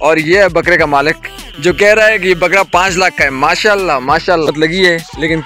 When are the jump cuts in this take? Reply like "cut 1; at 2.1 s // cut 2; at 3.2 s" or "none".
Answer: cut 1; at 4.5 s